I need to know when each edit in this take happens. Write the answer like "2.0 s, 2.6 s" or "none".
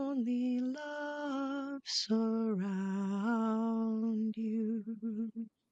none